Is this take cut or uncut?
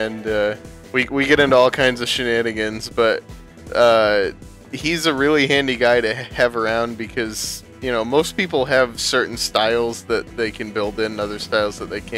uncut